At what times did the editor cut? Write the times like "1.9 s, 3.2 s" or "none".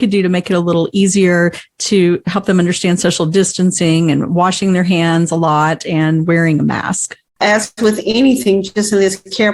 7.4 s